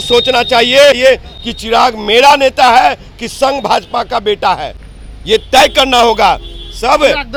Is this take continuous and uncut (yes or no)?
yes